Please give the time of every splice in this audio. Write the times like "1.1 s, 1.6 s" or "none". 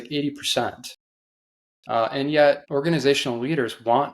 2.6 s